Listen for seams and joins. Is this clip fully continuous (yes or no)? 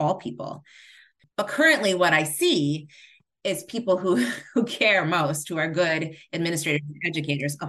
no